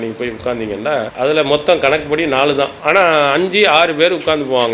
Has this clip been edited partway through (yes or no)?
yes